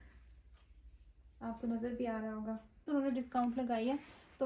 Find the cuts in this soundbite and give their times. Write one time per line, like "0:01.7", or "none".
0:02.9